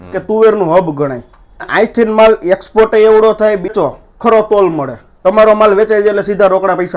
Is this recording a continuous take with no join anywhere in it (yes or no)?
no